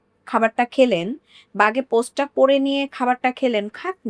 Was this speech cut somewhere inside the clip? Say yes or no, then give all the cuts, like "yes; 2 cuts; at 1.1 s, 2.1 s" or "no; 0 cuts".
no; 0 cuts